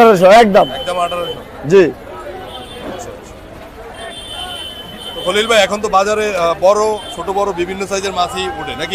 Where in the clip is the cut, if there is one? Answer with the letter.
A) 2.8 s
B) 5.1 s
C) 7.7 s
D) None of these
D